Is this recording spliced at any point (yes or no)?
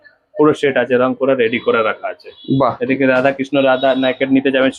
no